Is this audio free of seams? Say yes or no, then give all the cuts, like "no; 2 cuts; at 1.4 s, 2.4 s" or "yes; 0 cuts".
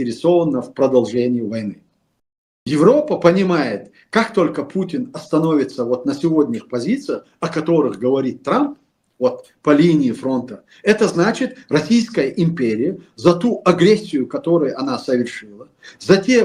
yes; 0 cuts